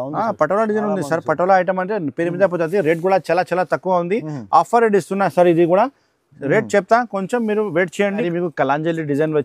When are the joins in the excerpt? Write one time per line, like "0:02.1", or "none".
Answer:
0:08.3